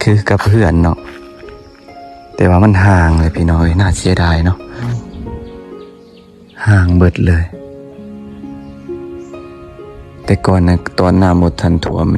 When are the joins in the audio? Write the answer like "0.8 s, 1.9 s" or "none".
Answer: 4.9 s